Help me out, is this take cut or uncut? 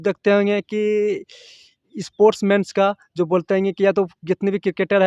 uncut